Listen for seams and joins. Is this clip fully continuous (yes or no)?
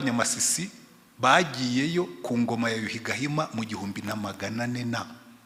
yes